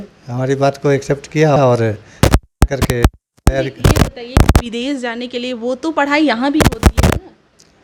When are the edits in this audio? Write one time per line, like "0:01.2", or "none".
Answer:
none